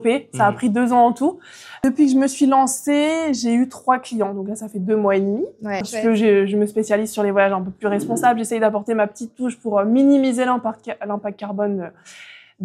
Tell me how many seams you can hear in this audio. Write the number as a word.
two